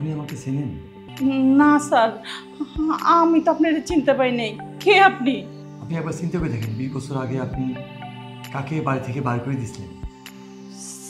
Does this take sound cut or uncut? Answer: cut